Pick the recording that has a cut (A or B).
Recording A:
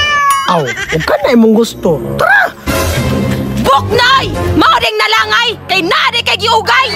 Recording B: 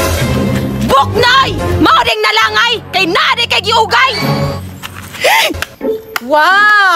B